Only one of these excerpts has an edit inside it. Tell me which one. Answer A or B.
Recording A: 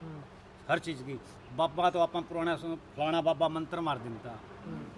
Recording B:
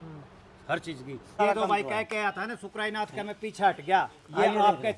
B